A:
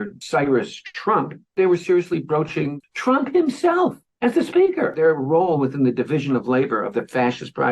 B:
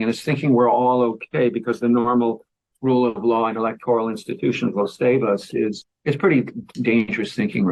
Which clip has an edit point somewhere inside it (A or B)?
A